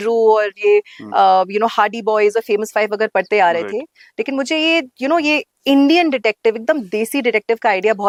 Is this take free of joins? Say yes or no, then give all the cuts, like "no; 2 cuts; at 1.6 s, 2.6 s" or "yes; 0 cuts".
yes; 0 cuts